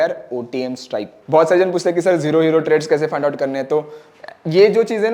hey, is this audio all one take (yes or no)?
no